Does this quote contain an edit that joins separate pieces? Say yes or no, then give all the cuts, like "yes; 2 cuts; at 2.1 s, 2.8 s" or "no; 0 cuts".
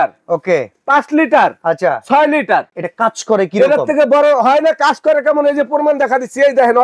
no; 0 cuts